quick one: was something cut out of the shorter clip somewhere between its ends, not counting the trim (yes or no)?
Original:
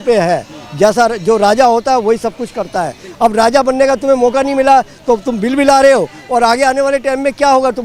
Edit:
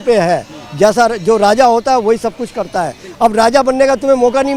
no